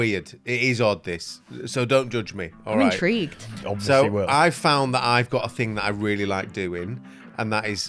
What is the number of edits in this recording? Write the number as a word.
zero